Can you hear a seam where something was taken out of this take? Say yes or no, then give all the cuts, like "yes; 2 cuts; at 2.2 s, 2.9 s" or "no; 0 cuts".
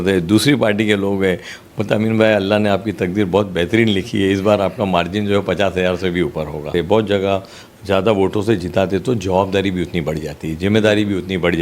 yes; 1 cut; at 6.7 s